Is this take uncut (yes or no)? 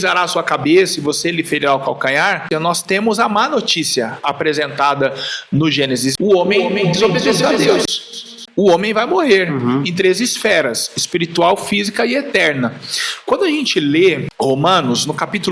no